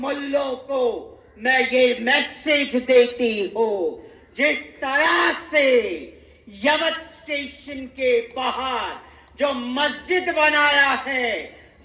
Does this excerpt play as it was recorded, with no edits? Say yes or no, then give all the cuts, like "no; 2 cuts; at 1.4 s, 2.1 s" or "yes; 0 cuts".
yes; 0 cuts